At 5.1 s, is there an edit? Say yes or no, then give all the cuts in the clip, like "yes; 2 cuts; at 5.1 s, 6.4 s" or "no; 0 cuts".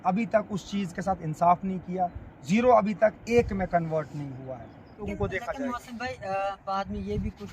yes; 1 cut; at 5.1 s